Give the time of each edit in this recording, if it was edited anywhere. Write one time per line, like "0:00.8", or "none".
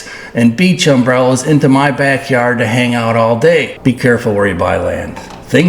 0:03.7